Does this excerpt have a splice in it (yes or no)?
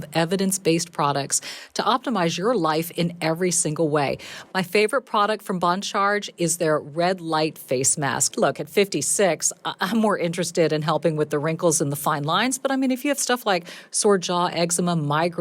yes